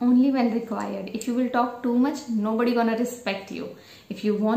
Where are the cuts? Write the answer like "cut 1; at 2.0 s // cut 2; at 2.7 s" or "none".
none